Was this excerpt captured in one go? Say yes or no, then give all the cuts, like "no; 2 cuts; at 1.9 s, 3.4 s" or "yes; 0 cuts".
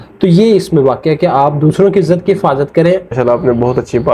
no; 1 cut; at 3.2 s